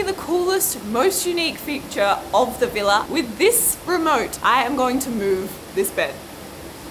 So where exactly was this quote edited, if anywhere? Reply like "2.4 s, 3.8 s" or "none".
3.0 s, 4.3 s